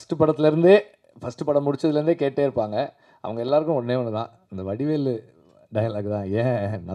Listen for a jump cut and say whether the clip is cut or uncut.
uncut